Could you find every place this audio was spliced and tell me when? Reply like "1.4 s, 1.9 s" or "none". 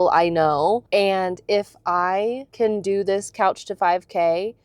0.8 s, 2.4 s